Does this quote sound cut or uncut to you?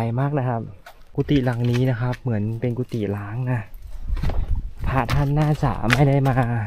cut